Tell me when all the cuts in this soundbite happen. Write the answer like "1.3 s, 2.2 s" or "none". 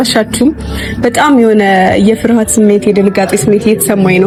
none